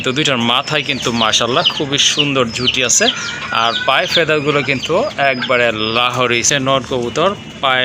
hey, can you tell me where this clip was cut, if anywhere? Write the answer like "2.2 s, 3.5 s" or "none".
6.4 s